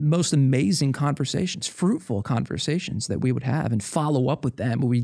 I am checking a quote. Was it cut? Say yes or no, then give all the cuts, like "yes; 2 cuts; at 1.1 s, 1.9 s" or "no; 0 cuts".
no; 0 cuts